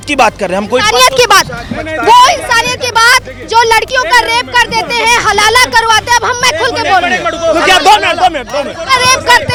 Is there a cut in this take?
no; 0 cuts

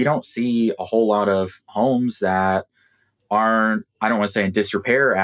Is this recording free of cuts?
yes; 0 cuts

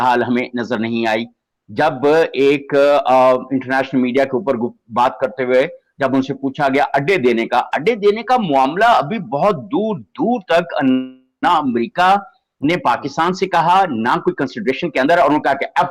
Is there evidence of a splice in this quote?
no; 0 cuts

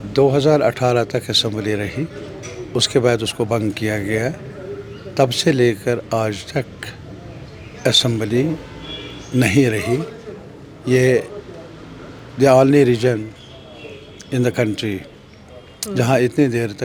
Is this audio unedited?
yes; 0 cuts

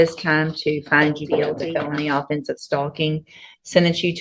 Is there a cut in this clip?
yes; 1 cut; at 1.6 s

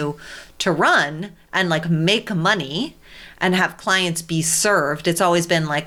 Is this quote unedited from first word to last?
yes; 0 cuts

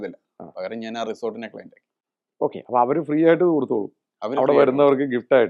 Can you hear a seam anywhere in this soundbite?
no; 0 cuts

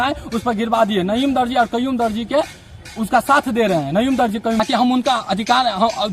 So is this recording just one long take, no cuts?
no; 1 cut; at 4.6 s

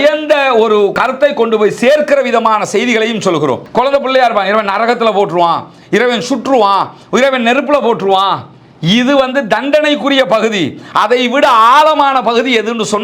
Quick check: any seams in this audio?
yes; 2 cuts; at 0.9 s, 3.6 s

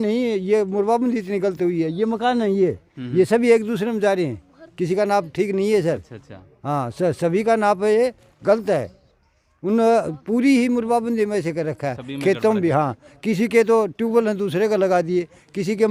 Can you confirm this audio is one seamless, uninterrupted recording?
yes; 0 cuts

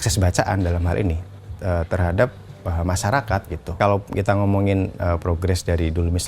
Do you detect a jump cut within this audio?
yes; 1 cut; at 3.6 s

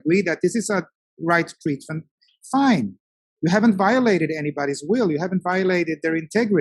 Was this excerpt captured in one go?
no; 1 cut; at 2.2 s

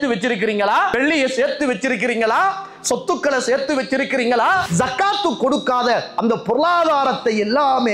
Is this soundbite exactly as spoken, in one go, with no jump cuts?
no; 2 cuts; at 0.9 s, 4.7 s

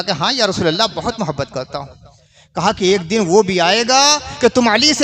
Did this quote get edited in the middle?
no; 0 cuts

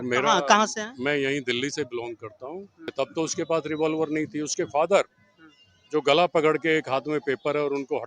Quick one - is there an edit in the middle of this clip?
yes; 1 cut; at 2.9 s

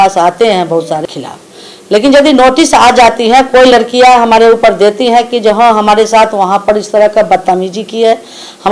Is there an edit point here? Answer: yes; 1 cut; at 1.0 s

